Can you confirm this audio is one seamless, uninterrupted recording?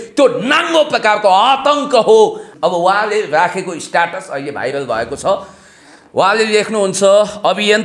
no; 1 cut; at 2.4 s

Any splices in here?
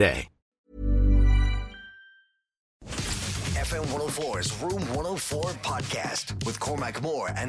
yes; 1 cut; at 2.9 s

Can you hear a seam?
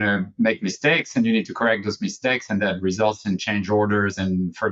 no; 0 cuts

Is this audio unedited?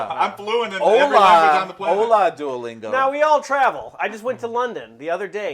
yes; 0 cuts

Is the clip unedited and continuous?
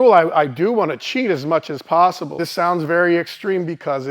no; 1 cut; at 2.4 s

